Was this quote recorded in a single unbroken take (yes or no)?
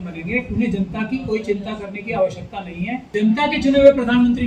no